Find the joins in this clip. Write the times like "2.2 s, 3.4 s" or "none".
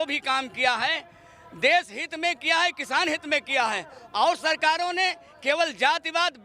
none

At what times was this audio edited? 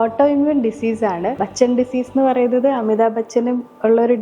1.4 s

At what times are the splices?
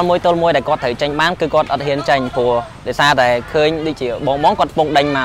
none

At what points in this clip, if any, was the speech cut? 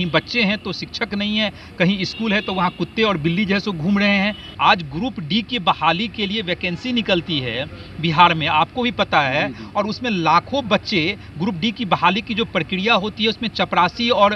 4.4 s

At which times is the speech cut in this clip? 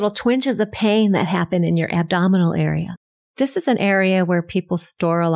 2.8 s

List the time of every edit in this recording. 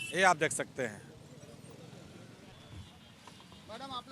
2.5 s

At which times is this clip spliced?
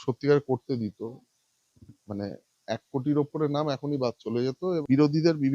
4.6 s

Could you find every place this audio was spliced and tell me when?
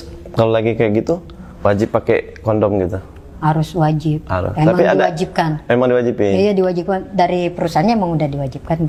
none

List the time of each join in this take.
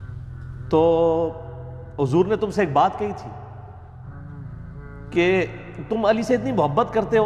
3.5 s, 5.1 s

